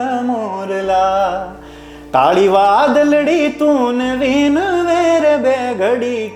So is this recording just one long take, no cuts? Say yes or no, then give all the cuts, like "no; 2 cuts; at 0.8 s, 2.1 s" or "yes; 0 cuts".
yes; 0 cuts